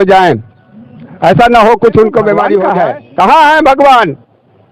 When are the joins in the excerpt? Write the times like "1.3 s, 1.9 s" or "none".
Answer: 2.6 s